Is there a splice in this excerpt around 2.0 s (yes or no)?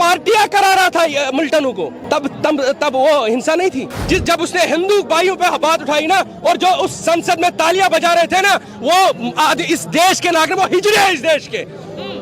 yes